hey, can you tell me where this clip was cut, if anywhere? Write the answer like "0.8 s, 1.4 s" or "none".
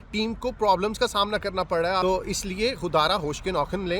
2.0 s